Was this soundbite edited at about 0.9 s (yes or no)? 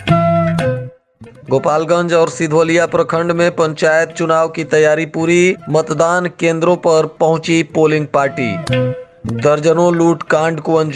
yes